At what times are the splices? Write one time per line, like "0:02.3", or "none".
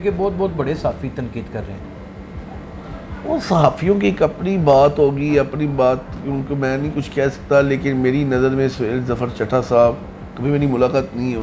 none